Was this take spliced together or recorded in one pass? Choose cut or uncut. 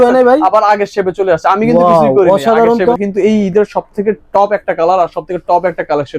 cut